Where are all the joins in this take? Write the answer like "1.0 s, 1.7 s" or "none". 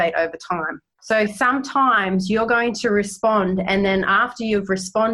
0.9 s